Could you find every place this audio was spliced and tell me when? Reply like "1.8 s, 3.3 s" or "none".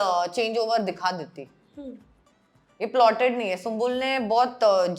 none